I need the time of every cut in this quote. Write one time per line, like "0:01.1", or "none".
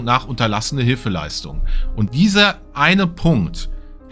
0:02.1